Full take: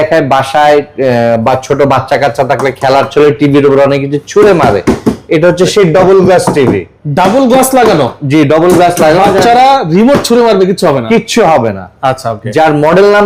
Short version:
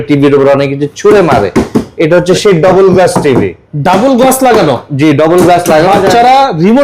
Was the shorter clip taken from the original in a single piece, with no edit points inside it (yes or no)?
yes